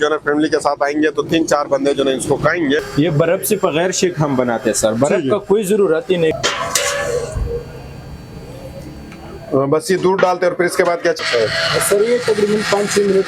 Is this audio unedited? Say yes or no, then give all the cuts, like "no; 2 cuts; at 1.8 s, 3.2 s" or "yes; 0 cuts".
no; 3 cuts; at 2.9 s, 6.4 s, 11.2 s